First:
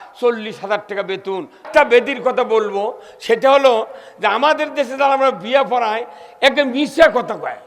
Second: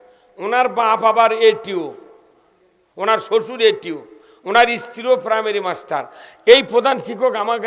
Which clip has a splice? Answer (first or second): first